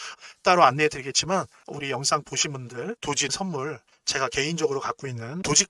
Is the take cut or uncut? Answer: cut